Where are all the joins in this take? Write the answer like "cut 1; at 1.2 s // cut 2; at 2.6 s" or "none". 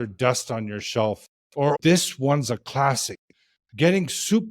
cut 1; at 1.7 s